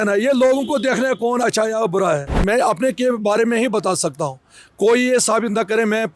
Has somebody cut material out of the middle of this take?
yes; 1 cut; at 2.3 s

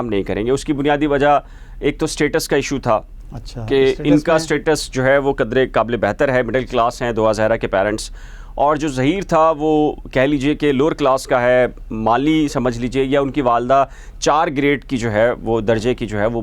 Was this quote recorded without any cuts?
yes; 0 cuts

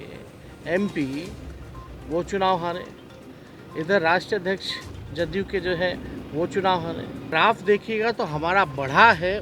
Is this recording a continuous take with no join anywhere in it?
no; 1 cut; at 7.3 s

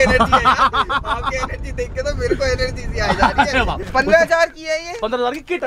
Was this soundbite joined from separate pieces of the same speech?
yes; 1 cut; at 3.8 s

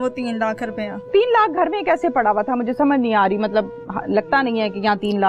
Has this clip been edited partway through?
no; 0 cuts

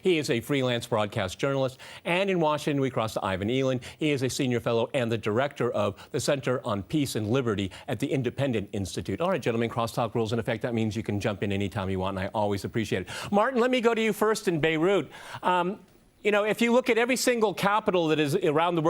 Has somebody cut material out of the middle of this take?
yes; 1 cut; at 13.6 s

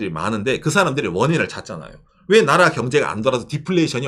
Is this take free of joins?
yes; 0 cuts

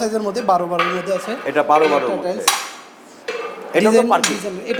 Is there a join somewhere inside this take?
no; 0 cuts

